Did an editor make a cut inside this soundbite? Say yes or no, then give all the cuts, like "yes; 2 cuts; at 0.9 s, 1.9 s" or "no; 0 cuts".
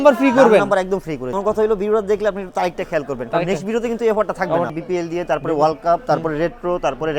yes; 2 cuts; at 1.4 s, 4.7 s